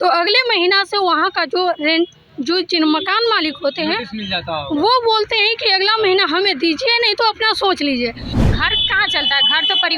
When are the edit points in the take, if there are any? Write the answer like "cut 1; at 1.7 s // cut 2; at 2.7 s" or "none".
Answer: cut 1; at 8.3 s